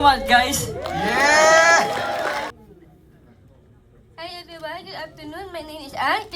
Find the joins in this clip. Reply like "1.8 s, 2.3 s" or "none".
2.5 s